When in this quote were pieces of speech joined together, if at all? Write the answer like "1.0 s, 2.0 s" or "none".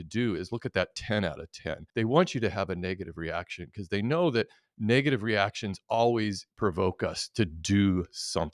1.8 s, 6.5 s